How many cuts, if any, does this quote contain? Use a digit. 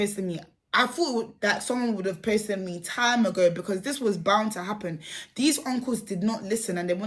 0